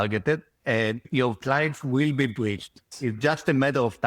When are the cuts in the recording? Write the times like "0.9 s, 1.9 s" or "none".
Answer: 1.1 s, 2.9 s